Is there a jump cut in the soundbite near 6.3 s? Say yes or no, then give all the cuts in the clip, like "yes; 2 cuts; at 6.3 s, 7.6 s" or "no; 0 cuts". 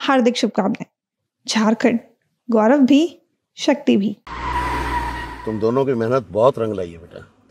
no; 1 cut; at 4.2 s